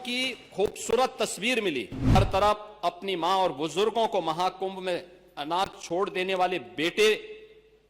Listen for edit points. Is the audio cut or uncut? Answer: cut